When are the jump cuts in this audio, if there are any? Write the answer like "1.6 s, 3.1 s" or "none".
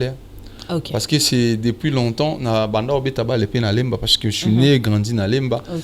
none